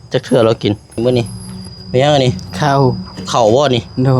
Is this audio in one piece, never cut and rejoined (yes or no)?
no